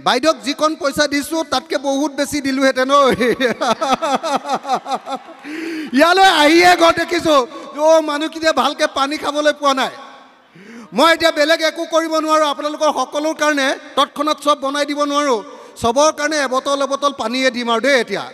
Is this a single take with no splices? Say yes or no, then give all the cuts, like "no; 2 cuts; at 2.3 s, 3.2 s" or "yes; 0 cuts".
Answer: yes; 0 cuts